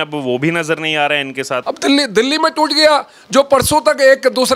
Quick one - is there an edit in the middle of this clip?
yes; 1 cut; at 1.6 s

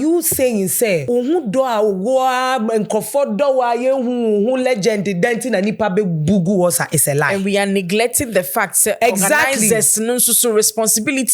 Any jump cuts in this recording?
yes; 1 cut; at 1.0 s

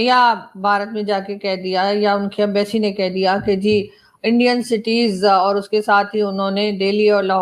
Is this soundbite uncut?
yes; 0 cuts

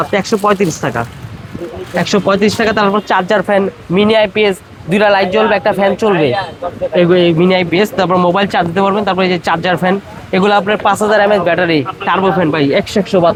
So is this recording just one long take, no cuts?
yes; 0 cuts

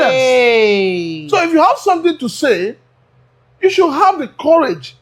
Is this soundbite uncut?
yes; 0 cuts

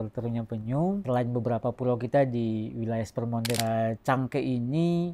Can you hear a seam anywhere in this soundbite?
yes; 2 cuts; at 1.0 s, 3.6 s

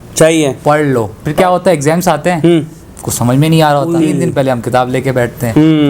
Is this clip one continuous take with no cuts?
no; 2 cuts; at 1.4 s, 4.0 s

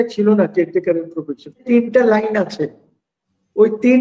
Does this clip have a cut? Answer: yes; 1 cut; at 1.6 s

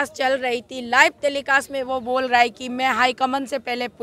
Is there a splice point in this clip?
no; 0 cuts

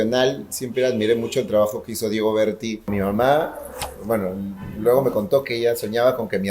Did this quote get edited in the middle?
yes; 1 cut; at 2.9 s

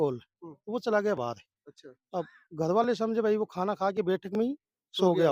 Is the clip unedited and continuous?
yes; 0 cuts

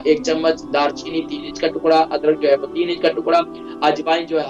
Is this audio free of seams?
yes; 0 cuts

